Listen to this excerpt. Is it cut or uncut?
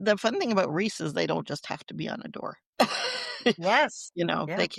uncut